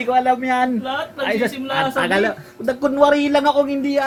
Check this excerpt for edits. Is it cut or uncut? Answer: uncut